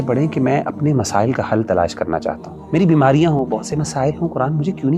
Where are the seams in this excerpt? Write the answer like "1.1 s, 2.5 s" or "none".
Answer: 2.5 s